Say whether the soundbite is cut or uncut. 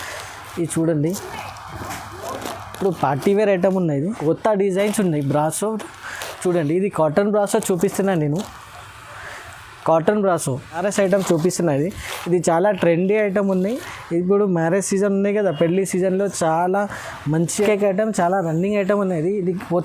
cut